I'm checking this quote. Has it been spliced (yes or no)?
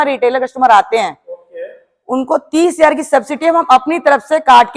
no